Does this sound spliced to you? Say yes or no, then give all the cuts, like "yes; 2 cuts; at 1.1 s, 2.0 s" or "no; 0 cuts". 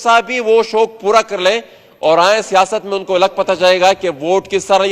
no; 0 cuts